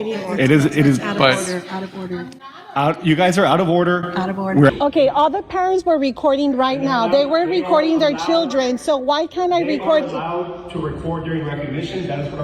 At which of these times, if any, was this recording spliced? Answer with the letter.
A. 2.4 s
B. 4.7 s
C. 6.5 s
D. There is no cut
B